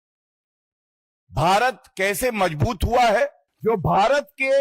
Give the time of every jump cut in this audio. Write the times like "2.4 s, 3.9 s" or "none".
3.5 s